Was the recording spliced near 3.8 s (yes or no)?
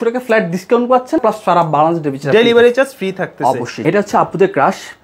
yes